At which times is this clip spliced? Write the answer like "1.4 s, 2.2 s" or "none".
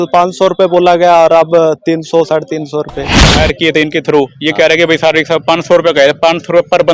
3.3 s